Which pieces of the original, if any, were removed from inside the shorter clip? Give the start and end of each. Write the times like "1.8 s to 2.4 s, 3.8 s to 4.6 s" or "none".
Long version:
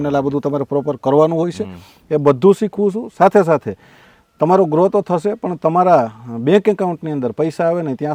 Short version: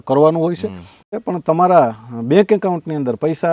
2.1 s to 5.3 s